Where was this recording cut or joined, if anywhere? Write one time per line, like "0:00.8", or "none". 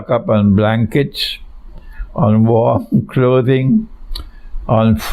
none